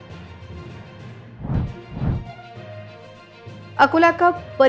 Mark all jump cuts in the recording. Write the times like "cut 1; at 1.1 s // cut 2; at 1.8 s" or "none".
cut 1; at 1.3 s